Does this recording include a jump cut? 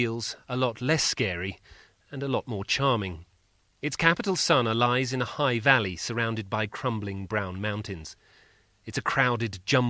yes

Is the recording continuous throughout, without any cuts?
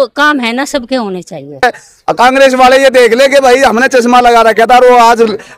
no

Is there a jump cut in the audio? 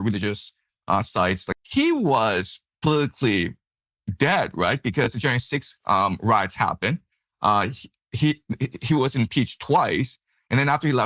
yes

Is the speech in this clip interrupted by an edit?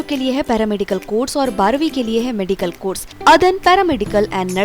yes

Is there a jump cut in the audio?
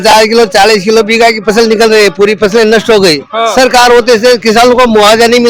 no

